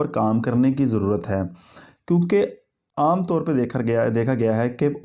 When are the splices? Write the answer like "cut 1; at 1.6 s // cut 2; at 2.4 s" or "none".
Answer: none